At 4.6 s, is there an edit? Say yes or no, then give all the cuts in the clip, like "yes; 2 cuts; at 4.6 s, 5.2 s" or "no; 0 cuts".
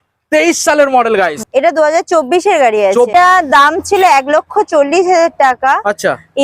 no; 2 cuts; at 1.4 s, 3.1 s